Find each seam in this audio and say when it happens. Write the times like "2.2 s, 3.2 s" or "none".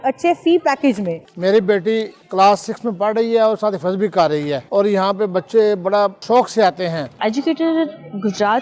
1.2 s, 2.2 s, 4.7 s, 7.1 s

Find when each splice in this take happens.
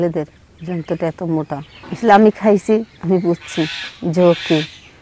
1.8 s

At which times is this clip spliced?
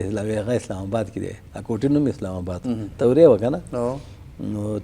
none

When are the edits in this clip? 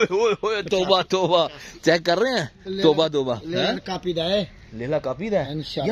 none

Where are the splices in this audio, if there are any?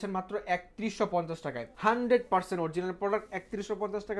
1.7 s

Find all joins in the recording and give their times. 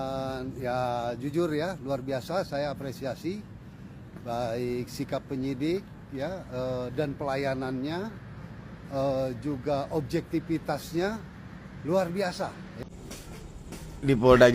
12.8 s

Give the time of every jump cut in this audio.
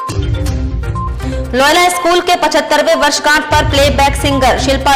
none

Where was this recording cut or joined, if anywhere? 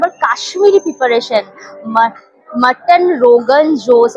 none

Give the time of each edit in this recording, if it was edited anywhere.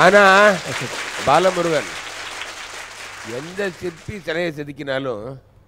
none

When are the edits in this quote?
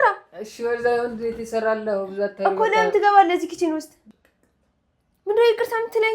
3.9 s

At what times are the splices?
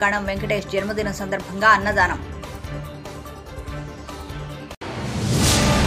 none

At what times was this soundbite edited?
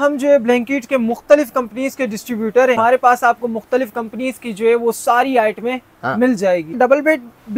2.8 s, 6.7 s

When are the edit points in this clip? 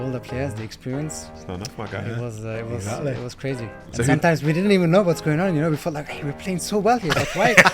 1.3 s

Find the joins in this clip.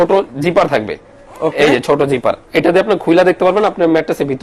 none

